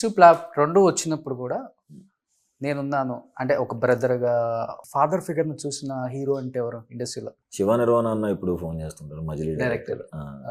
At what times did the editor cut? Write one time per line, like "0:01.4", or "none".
0:07.4